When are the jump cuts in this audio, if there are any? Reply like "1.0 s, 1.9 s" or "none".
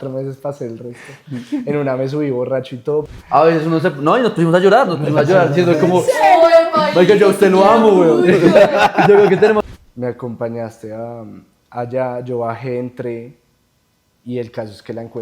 3.1 s, 9.6 s